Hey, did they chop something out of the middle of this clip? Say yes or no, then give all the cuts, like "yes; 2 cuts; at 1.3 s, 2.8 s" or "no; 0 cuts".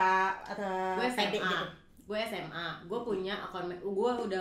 no; 0 cuts